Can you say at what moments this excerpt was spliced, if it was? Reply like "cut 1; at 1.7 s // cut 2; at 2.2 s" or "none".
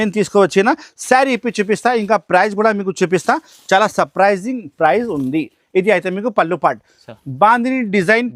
none